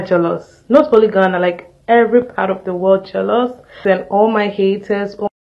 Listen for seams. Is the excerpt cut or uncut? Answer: cut